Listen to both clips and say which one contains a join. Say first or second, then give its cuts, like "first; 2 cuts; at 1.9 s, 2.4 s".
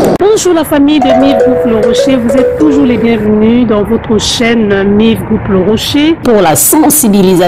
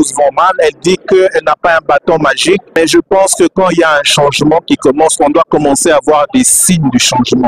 second; 1 cut; at 2.8 s